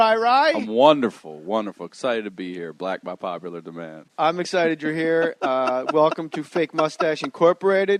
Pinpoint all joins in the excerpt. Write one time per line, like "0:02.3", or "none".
0:03.0